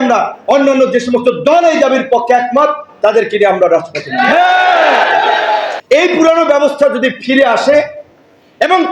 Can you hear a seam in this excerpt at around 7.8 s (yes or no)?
no